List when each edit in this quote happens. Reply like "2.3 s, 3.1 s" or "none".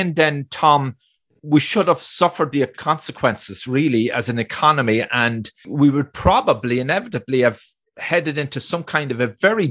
2.8 s, 5.7 s